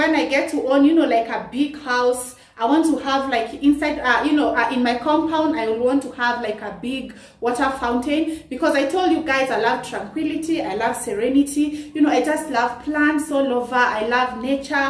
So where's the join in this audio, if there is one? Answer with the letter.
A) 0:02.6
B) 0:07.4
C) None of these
C